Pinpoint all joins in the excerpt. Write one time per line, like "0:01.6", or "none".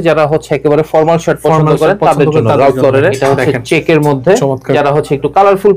0:03.2
0:04.7